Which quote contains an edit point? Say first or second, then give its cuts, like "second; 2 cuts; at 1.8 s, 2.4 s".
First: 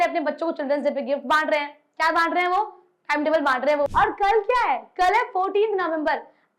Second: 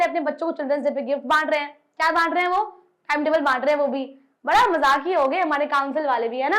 first; 1 cut; at 3.9 s